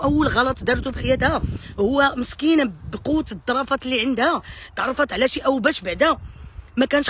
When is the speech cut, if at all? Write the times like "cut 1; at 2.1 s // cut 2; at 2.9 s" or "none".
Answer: none